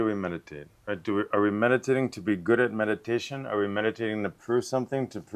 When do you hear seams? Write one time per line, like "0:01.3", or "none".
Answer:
none